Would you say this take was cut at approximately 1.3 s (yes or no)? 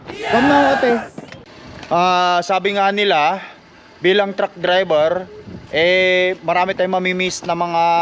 yes